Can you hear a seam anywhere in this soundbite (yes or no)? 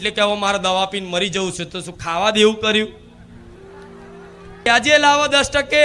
yes